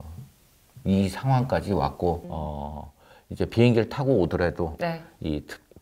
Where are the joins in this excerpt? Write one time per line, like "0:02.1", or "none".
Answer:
0:02.2